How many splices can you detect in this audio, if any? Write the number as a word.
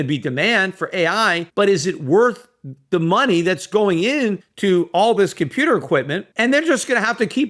three